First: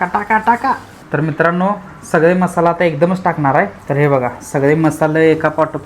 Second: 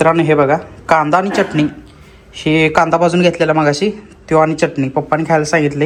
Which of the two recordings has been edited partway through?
first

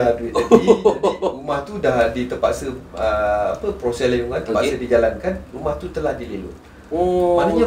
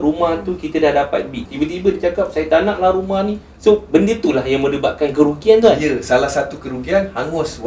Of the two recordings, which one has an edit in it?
second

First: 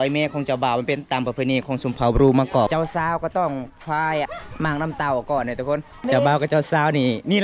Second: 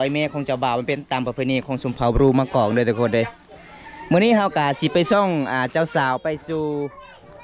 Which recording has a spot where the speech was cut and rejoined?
first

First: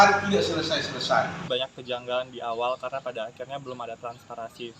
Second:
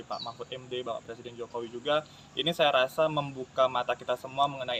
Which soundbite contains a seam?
first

